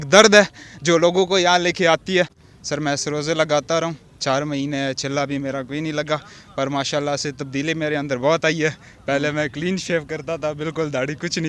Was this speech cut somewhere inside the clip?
yes; 1 cut; at 2.5 s

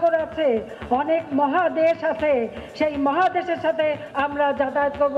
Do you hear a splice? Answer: yes; 1 cut; at 4.1 s

